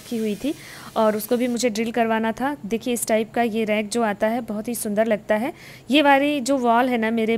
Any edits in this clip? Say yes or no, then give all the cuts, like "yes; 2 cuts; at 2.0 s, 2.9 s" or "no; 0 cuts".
no; 0 cuts